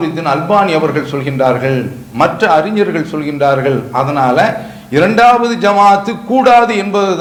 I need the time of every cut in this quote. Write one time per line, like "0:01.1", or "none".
none